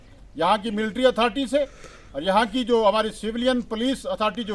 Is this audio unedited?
yes; 0 cuts

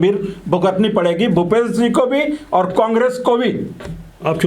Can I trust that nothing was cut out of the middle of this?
yes; 0 cuts

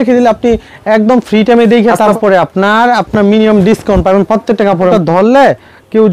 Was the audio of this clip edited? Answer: yes; 2 cuts; at 2.2 s, 4.9 s

